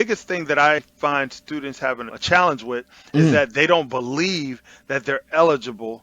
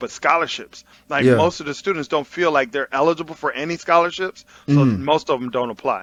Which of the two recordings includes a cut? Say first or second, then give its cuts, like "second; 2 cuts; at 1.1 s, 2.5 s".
first; 2 cuts; at 0.8 s, 2.1 s